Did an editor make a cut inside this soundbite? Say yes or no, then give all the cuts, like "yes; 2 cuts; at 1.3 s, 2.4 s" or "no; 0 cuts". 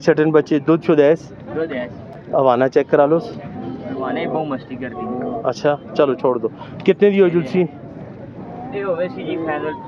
no; 0 cuts